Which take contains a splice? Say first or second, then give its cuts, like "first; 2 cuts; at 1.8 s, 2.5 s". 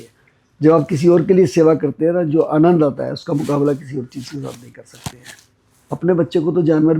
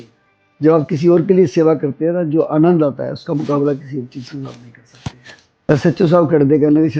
second; 1 cut; at 5.7 s